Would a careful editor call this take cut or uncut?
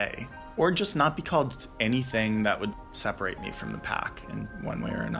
uncut